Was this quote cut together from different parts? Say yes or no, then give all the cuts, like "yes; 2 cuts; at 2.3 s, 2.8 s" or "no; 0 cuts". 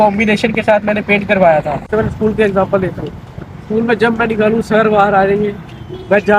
yes; 1 cut; at 1.8 s